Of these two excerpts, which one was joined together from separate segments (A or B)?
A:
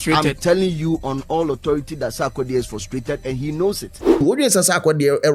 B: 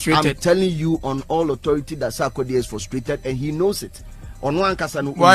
A